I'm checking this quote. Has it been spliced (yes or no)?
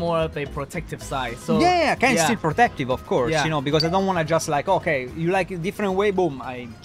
no